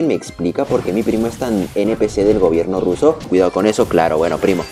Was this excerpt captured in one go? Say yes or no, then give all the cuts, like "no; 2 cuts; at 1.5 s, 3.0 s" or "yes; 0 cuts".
no; 1 cut; at 3.3 s